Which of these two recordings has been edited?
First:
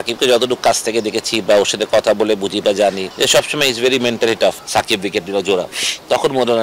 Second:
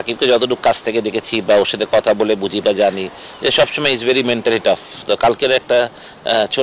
first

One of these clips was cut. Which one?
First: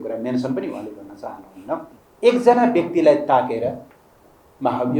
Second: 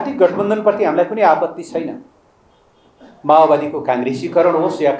first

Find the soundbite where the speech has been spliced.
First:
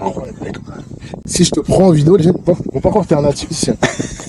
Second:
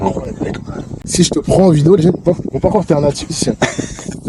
second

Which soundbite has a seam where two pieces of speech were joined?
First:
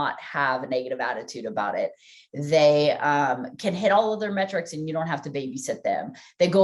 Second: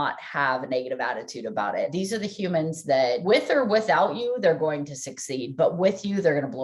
second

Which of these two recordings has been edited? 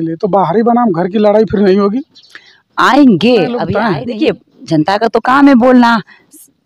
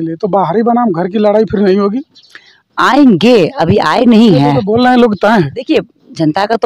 first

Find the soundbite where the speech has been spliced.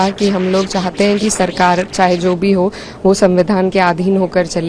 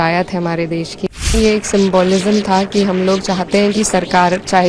second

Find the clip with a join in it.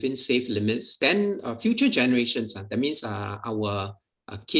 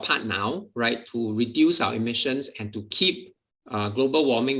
second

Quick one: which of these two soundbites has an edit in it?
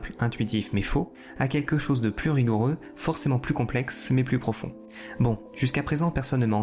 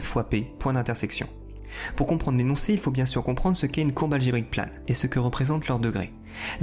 first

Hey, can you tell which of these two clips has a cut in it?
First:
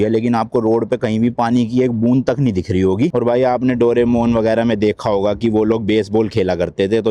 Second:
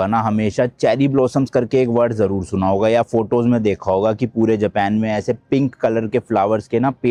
first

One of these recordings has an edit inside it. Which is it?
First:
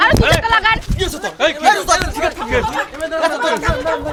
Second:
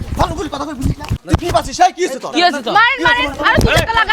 second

